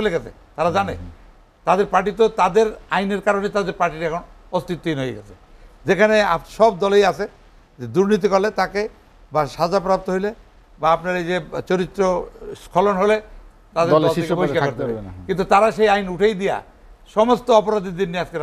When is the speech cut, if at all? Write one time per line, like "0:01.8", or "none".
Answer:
none